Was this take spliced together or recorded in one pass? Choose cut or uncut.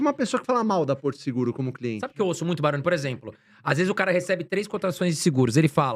cut